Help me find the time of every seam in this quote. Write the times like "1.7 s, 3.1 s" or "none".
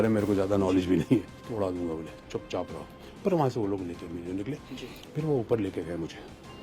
1.4 s, 4.7 s